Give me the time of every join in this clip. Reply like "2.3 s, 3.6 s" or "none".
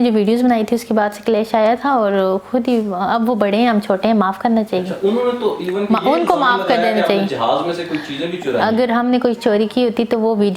none